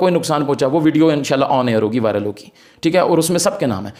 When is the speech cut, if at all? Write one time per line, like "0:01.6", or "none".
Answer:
none